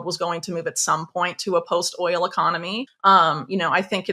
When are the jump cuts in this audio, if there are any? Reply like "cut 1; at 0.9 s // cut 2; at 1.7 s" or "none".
cut 1; at 2.8 s